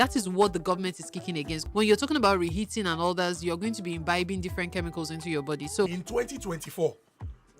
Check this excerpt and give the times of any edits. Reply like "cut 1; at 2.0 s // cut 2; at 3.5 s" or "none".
cut 1; at 1.6 s // cut 2; at 5.9 s